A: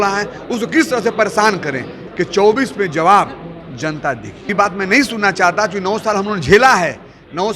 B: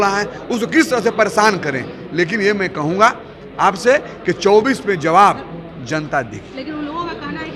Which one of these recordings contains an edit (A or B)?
A